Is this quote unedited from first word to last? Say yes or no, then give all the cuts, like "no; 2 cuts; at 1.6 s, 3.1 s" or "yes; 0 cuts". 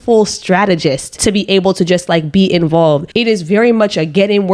yes; 0 cuts